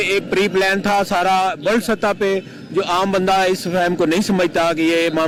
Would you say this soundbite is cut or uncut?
uncut